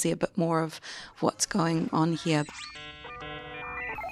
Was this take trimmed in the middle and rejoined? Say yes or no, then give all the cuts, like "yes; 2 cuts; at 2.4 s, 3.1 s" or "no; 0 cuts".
yes; 1 cut; at 2.5 s